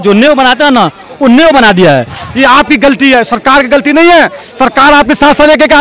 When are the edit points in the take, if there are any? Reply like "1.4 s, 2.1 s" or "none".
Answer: 2.2 s

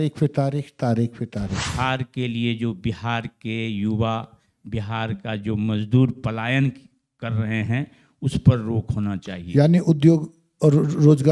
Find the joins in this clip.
1.7 s

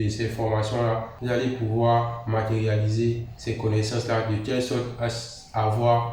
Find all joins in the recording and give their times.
1.1 s, 3.3 s

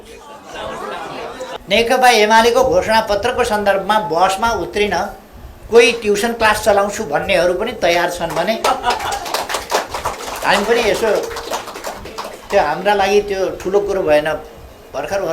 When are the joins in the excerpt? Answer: 1.5 s

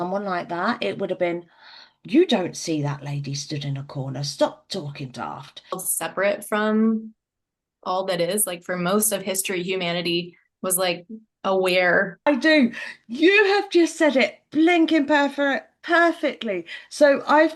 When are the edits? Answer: 5.9 s, 12.2 s

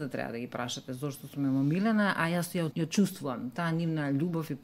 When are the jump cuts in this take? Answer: 2.7 s

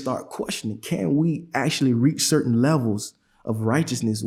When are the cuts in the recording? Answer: none

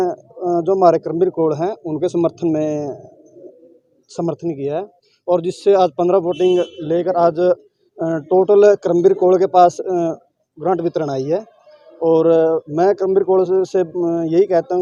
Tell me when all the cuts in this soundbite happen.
none

